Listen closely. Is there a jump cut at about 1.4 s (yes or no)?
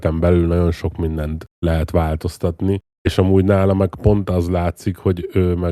yes